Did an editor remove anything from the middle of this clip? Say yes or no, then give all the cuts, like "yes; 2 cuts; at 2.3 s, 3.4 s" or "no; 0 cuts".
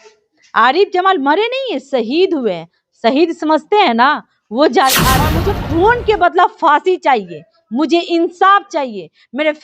yes; 1 cut; at 5.3 s